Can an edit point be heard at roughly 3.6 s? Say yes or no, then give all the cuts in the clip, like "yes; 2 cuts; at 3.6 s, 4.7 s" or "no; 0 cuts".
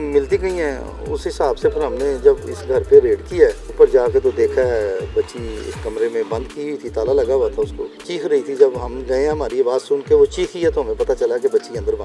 yes; 2 cuts; at 3.6 s, 8.0 s